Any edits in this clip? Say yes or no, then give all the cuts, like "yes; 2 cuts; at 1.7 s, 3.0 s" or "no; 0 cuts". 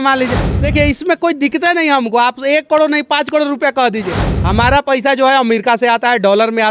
no; 0 cuts